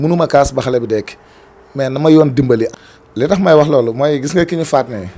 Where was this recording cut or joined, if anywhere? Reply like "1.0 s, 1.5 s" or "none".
2.7 s